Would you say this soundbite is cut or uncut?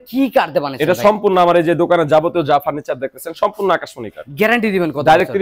uncut